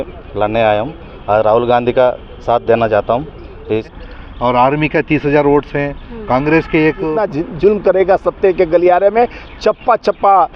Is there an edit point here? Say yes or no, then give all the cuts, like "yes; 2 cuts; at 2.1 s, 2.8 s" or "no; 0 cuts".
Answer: yes; 2 cuts; at 3.9 s, 7.2 s